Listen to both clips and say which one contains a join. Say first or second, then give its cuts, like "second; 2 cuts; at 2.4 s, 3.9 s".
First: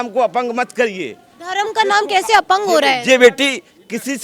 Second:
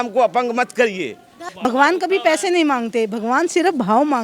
second; 1 cut; at 1.4 s